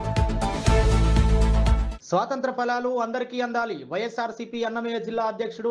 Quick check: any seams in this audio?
yes; 1 cut; at 1.9 s

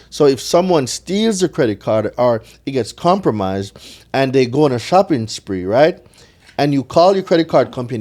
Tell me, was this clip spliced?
no; 0 cuts

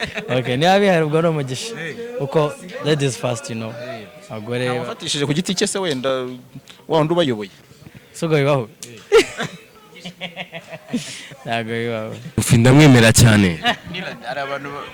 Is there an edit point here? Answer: yes; 1 cut; at 12.4 s

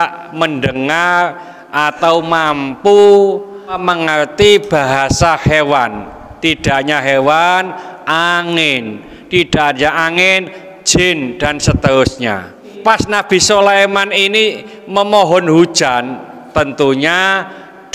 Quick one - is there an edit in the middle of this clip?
yes; 2 cuts; at 3.8 s, 12.7 s

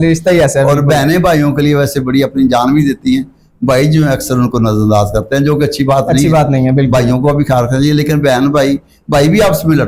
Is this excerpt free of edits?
yes; 0 cuts

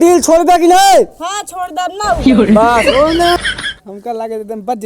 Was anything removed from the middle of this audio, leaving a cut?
yes; 1 cut; at 3.3 s

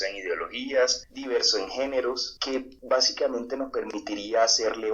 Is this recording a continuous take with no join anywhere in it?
no; 2 cuts; at 1.1 s, 2.6 s

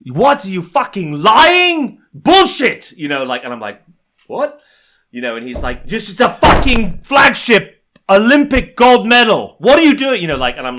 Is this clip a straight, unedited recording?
yes; 0 cuts

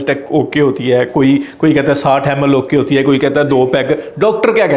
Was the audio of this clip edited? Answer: no; 0 cuts

